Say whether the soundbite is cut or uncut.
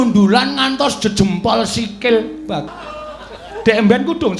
cut